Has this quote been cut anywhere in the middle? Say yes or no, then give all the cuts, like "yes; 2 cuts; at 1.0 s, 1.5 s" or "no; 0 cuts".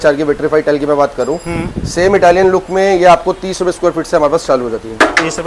no; 0 cuts